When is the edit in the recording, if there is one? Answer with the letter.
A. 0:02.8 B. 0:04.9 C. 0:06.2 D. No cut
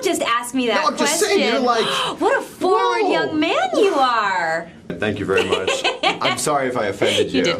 B